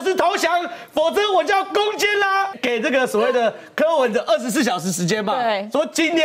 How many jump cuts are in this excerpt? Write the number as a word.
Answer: one